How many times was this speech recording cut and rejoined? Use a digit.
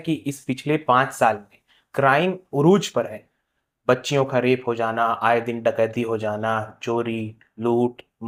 0